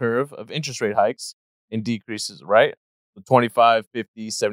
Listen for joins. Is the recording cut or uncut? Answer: cut